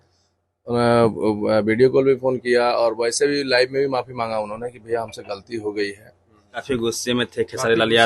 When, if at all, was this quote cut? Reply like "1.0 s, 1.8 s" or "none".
6.6 s